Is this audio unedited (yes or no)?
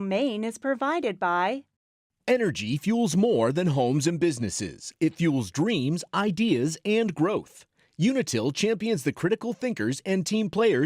no